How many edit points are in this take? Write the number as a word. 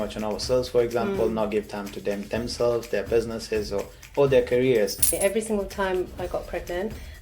one